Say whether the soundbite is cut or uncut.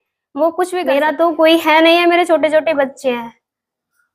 cut